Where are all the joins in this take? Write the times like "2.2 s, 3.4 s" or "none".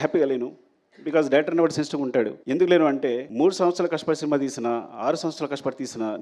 2.4 s, 3.2 s